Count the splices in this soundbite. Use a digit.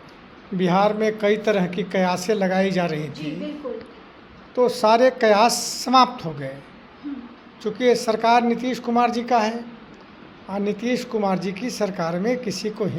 0